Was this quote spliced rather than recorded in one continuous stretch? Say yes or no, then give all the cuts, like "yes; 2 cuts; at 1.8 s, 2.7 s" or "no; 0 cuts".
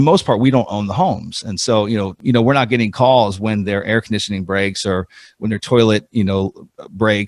yes; 1 cut; at 2.2 s